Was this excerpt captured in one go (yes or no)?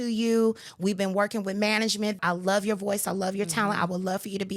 no